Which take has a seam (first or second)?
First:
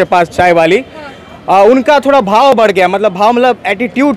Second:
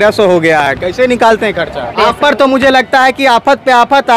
second